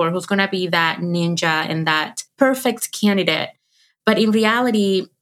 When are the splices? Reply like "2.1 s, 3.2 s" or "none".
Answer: 2.2 s